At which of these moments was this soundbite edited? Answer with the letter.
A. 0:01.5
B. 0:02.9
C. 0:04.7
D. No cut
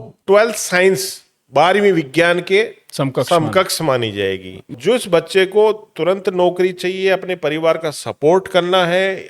C